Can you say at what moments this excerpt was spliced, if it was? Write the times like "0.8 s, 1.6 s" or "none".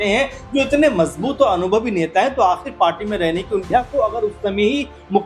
3.7 s